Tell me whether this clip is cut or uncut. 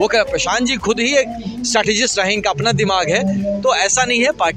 uncut